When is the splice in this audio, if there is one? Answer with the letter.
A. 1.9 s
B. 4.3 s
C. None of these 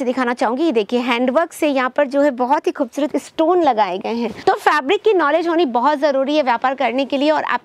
B